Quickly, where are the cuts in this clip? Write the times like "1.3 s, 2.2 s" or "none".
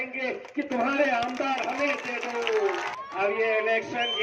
2.9 s